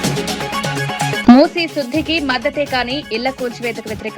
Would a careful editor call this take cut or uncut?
cut